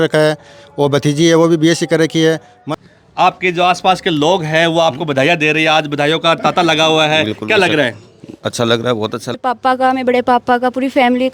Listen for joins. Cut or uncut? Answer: cut